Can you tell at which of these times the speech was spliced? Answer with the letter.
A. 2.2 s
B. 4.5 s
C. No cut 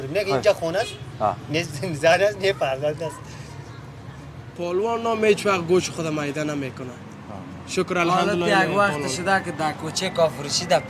B